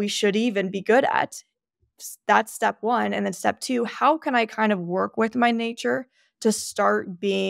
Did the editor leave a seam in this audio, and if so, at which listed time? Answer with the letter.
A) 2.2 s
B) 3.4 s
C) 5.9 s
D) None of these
D